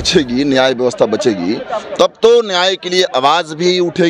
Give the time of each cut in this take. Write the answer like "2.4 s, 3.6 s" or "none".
none